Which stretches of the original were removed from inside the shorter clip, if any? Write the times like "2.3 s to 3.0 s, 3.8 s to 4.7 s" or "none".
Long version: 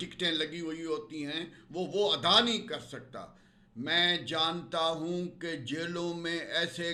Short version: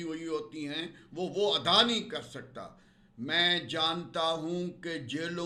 none